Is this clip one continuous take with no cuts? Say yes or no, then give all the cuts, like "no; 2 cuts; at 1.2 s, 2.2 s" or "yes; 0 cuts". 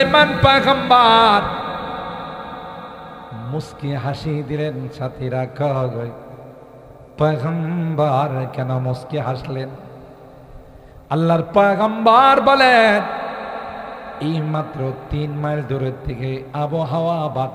yes; 0 cuts